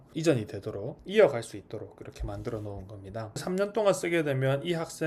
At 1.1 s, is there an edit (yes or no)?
no